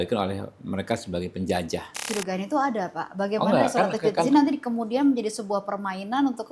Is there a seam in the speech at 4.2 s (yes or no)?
no